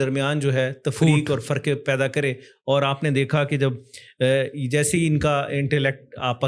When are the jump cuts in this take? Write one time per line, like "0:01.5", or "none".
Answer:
none